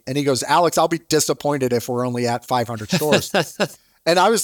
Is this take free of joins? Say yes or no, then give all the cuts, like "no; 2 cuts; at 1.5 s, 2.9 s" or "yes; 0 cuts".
yes; 0 cuts